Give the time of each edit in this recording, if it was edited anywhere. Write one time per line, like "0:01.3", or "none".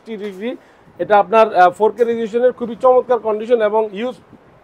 none